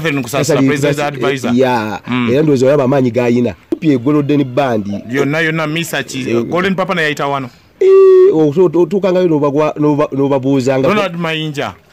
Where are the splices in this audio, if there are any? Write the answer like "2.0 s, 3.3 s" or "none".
3.8 s

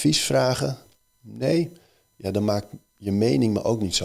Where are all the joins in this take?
none

